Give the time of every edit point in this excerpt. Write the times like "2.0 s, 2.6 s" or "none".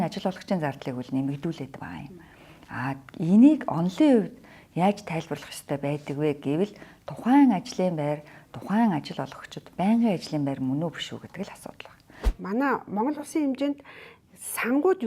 12.2 s